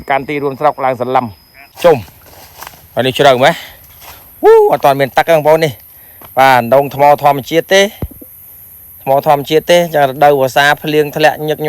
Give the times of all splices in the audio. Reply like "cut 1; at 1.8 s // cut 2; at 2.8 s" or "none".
cut 1; at 1.7 s

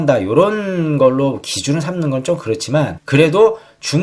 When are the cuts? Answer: cut 1; at 3.0 s

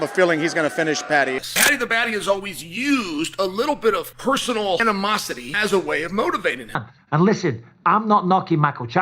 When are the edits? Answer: cut 1; at 1.4 s // cut 2; at 6.9 s

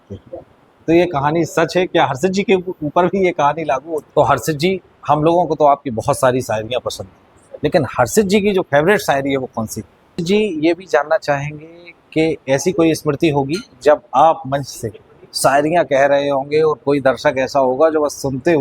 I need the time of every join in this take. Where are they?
cut 1; at 4.0 s // cut 2; at 10.2 s

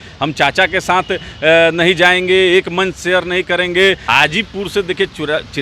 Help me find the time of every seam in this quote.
cut 1; at 4.0 s

